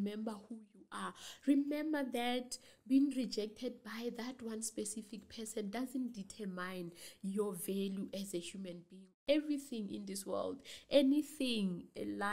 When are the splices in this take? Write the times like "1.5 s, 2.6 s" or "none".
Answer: 9.1 s